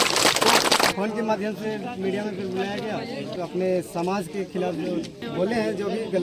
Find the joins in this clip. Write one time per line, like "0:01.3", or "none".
0:00.9
0:03.3
0:05.2